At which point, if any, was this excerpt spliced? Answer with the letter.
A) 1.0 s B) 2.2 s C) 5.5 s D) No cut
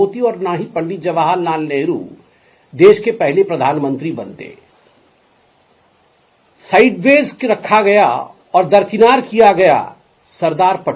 D